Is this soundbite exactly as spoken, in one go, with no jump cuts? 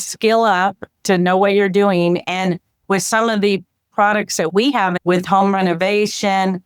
no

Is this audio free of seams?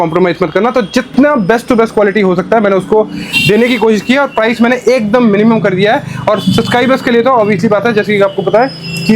yes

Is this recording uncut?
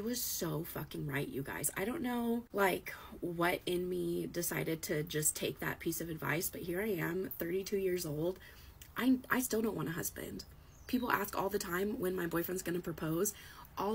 no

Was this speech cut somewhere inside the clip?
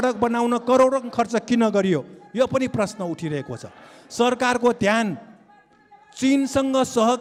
no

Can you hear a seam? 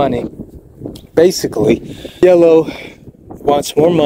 yes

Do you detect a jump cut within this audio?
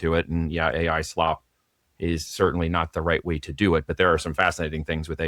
no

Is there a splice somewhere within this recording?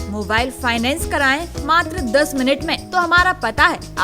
yes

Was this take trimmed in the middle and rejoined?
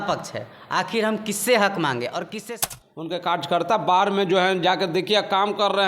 yes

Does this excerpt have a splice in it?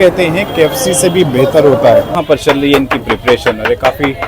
yes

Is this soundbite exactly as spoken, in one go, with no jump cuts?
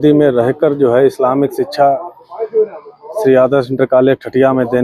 yes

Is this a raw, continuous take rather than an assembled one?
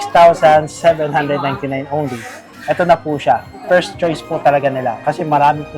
no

